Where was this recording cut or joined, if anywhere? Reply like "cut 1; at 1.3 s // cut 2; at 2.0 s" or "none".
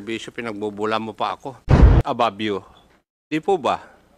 cut 1; at 1.9 s